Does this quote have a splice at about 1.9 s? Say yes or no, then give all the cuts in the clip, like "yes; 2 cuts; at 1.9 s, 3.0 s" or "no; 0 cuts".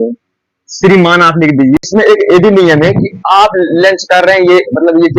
yes; 1 cut; at 1.9 s